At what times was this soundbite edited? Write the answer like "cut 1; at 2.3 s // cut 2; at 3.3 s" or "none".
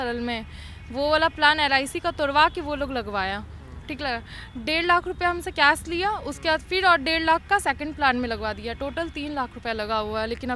none